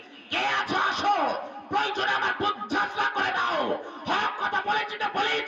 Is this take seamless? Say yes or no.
yes